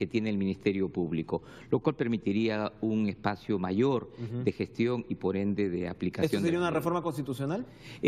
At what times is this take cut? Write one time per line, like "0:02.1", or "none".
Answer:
0:04.2